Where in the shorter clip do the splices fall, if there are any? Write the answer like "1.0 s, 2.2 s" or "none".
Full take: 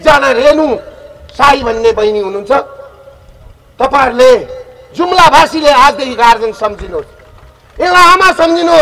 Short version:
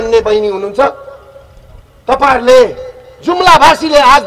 none